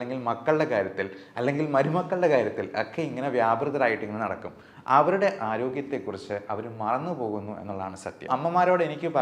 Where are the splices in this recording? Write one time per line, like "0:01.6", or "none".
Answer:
0:08.3